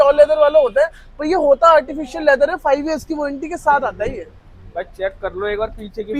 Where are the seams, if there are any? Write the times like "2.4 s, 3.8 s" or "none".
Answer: none